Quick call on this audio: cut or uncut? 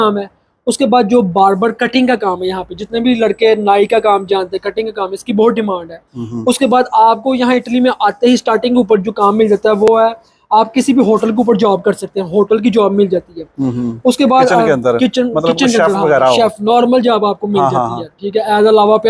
uncut